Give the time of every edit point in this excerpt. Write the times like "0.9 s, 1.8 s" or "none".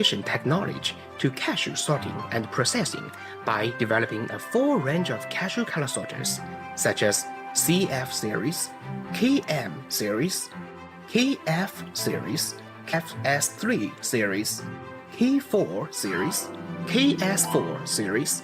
12.9 s

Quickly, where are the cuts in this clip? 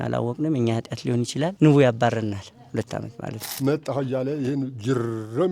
3.6 s

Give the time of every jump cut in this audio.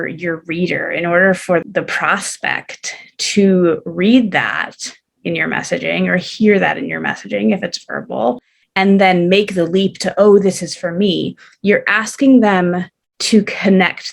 1.6 s

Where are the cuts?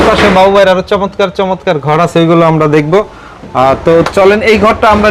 none

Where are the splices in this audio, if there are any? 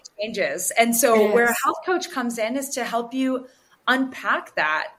none

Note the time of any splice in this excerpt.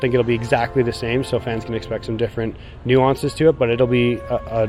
none

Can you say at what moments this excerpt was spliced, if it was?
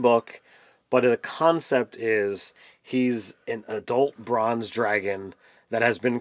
3.7 s

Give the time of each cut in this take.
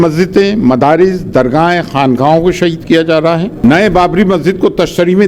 3.5 s

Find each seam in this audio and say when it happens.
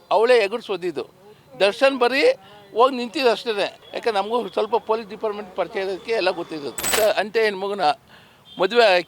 3.8 s, 6.9 s

